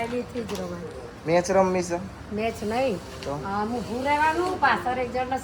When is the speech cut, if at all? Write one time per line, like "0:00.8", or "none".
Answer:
none